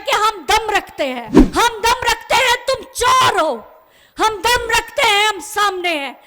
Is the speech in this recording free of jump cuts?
no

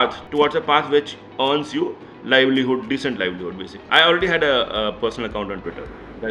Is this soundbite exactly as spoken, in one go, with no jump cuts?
no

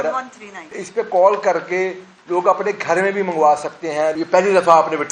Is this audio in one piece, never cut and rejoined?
no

